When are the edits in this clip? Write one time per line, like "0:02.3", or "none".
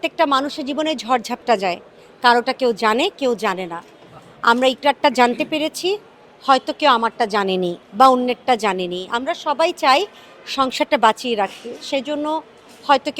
none